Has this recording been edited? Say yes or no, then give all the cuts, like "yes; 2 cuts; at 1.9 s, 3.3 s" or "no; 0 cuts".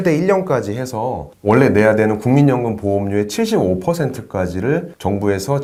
no; 0 cuts